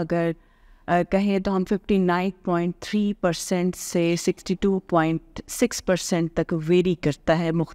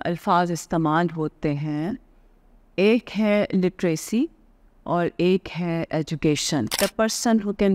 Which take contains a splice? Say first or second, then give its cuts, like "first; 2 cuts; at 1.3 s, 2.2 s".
second; 1 cut; at 6.8 s